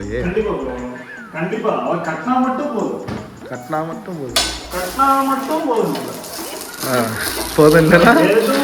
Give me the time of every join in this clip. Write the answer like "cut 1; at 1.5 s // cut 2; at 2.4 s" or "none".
none